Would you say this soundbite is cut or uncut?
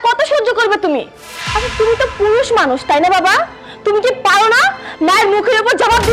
uncut